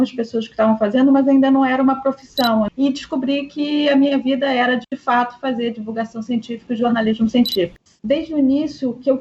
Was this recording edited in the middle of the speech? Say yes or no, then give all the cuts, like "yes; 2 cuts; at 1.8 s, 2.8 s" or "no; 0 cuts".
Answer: yes; 2 cuts; at 2.7 s, 7.8 s